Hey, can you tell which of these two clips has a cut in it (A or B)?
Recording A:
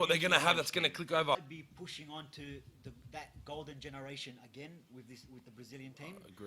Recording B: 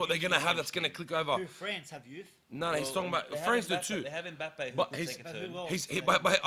A